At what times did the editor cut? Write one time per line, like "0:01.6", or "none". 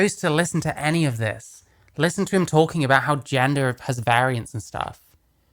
none